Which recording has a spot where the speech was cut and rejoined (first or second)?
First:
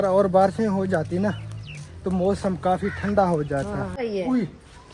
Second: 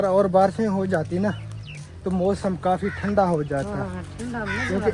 first